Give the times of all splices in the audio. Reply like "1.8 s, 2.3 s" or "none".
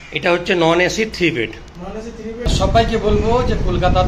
2.5 s